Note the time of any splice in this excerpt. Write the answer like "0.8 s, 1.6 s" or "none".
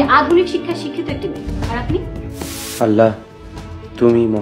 2.6 s